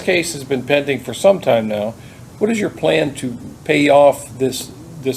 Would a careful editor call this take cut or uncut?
uncut